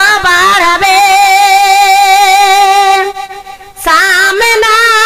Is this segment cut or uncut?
uncut